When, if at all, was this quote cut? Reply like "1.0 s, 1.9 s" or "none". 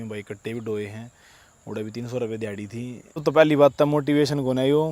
3.1 s